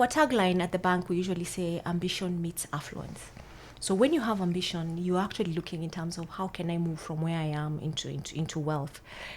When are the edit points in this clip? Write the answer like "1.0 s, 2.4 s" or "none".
none